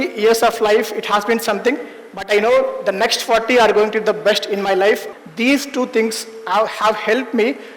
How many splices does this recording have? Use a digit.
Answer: 1